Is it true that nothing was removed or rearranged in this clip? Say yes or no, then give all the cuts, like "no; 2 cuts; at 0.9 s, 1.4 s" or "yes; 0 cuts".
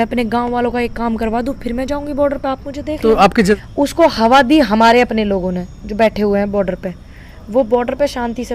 no; 1 cut; at 3.5 s